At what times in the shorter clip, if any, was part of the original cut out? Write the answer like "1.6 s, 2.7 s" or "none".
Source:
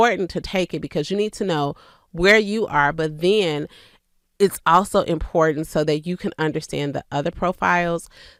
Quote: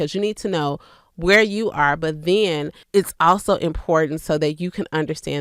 2.7 s